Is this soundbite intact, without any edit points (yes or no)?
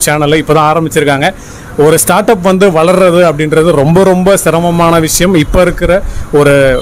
yes